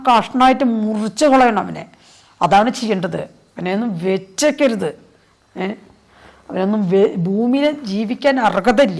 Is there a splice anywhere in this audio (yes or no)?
no